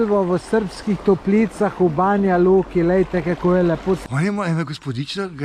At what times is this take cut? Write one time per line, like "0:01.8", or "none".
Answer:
0:04.0